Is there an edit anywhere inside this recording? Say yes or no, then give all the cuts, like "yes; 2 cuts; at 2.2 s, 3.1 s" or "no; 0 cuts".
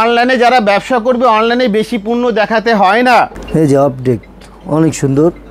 yes; 1 cut; at 3.4 s